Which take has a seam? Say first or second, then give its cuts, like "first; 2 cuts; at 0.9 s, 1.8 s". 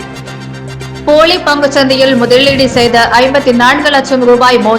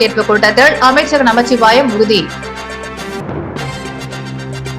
first; 1 cut; at 1.0 s